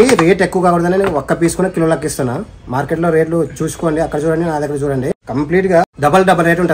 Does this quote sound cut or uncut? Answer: cut